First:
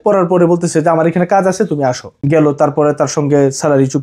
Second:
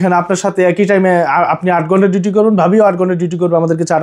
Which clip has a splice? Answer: first; 1 cut; at 2.1 s

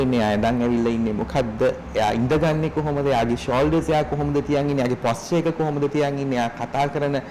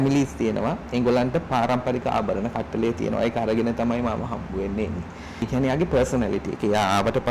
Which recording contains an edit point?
second; 1 cut; at 5.5 s

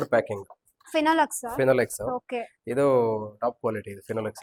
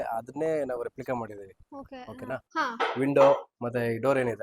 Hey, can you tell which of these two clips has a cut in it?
second; 1 cut; at 2.5 s

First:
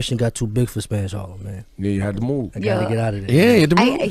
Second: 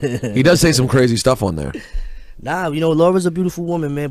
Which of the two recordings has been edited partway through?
second; 1 cut; at 3.0 s

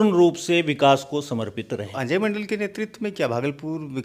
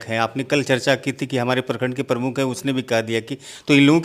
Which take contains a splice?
first; 1 cut; at 1.9 s

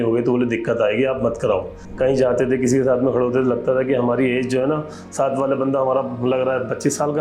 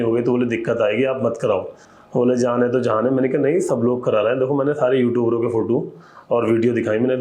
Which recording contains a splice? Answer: first; 1 cut; at 1.8 s

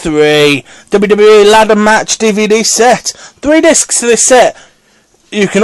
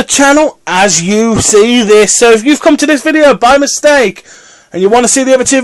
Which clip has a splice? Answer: second; 1 cut; at 1.3 s

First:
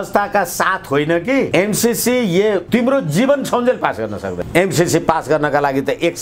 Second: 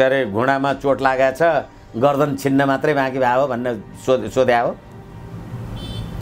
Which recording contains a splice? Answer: first; 3 cuts; at 1.5 s, 2.6 s, 4.4 s

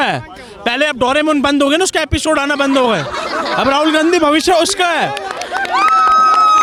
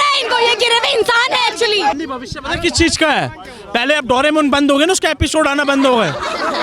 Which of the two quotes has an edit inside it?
second; 1 cut; at 2.0 s

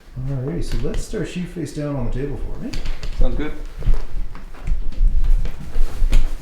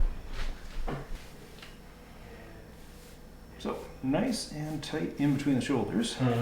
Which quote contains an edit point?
second; 1 cut; at 1.1 s

